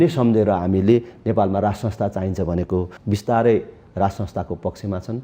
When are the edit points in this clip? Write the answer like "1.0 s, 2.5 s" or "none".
2.9 s